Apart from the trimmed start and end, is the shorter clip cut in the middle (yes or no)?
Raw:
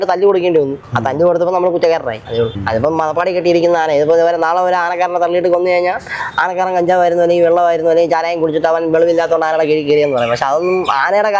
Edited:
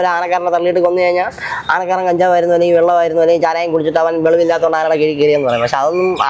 no